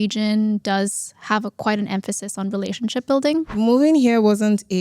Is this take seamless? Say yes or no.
no